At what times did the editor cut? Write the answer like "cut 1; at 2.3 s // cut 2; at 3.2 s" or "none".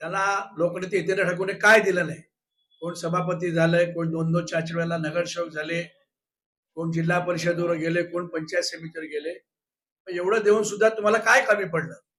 none